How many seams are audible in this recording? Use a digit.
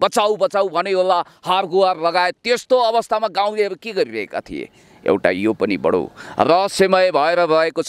0